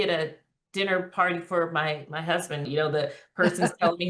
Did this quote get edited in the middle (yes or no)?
yes